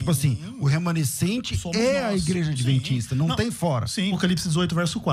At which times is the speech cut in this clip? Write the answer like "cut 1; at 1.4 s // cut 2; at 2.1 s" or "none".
cut 1; at 4.2 s